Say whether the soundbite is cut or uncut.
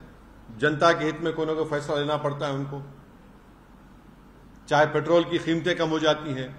uncut